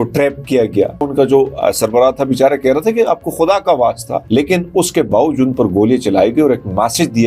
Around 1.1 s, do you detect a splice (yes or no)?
yes